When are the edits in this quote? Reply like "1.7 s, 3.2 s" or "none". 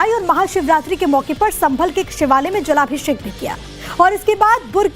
1.3 s